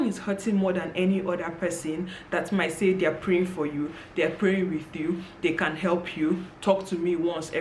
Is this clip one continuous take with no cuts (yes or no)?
yes